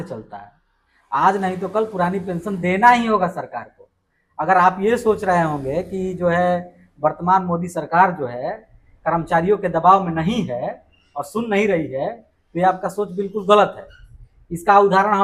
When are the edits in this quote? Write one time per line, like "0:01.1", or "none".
none